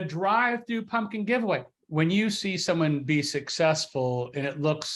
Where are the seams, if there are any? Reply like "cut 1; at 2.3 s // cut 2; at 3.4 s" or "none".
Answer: cut 1; at 1.8 s